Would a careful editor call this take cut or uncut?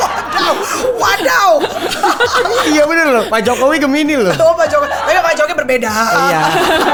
uncut